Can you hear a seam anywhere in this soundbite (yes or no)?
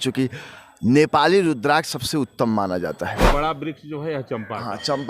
yes